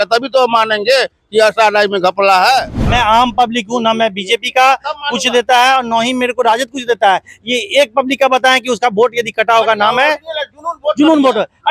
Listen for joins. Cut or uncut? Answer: cut